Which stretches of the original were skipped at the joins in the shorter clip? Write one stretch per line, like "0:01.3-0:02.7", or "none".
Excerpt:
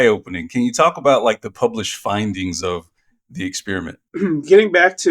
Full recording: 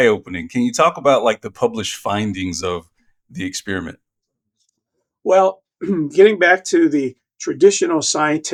0:04.0-0:05.7